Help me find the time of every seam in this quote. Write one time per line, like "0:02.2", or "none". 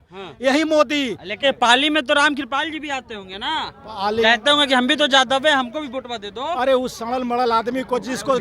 0:01.4